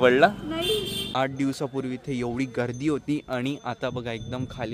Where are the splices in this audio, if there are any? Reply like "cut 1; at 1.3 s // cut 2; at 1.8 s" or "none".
cut 1; at 1.0 s